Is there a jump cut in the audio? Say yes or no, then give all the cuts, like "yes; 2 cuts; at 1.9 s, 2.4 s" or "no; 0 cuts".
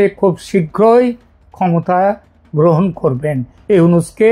no; 0 cuts